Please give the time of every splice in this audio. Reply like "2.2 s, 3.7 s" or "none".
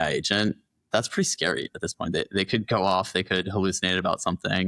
none

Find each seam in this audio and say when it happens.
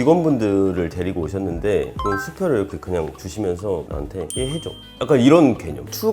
2.0 s

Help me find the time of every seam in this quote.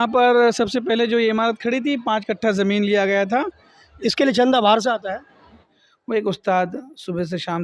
5.6 s

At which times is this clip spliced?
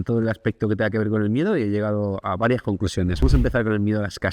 3.2 s

